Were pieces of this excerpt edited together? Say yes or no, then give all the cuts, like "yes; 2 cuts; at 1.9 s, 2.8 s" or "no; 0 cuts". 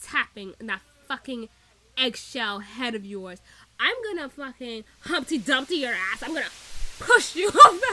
no; 0 cuts